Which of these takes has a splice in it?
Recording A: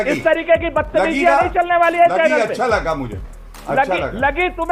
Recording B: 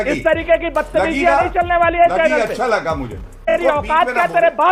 B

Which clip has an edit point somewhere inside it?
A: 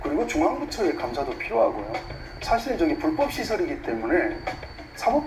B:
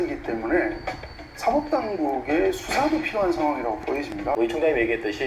B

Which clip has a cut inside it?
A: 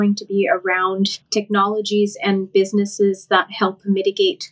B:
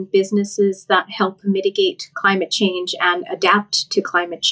A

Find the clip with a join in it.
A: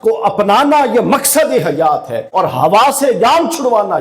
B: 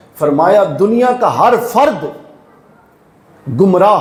A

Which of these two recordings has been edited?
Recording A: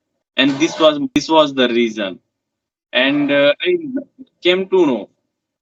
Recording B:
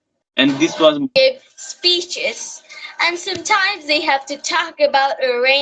B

